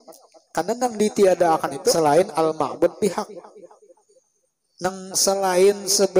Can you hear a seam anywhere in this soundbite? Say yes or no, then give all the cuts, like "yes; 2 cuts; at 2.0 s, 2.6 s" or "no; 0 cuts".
yes; 1 cut; at 1.9 s